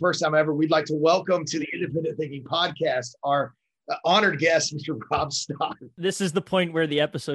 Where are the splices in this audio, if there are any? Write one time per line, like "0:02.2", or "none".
0:05.7